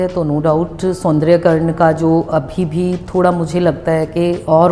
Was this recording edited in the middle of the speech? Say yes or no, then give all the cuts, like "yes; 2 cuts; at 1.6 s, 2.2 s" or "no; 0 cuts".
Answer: no; 0 cuts